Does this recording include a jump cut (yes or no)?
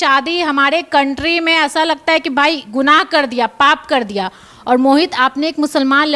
no